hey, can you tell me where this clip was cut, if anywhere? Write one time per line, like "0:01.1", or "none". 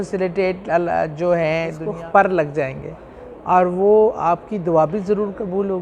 0:01.8